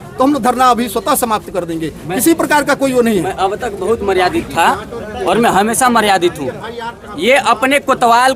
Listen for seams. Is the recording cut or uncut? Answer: uncut